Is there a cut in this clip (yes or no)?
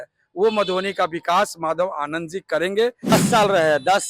yes